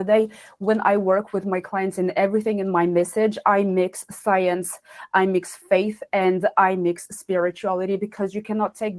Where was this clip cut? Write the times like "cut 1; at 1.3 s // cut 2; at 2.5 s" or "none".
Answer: none